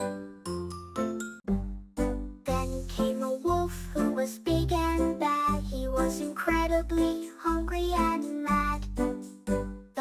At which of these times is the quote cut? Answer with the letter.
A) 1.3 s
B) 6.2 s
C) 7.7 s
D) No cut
A